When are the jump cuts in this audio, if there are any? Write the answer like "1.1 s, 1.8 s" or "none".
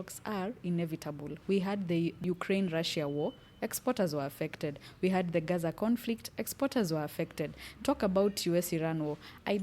2.2 s